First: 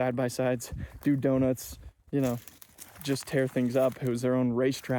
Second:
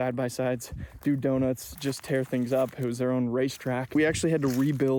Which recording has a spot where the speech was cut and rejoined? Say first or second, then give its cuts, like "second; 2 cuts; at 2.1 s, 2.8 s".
second; 2 cuts; at 1.7 s, 3.9 s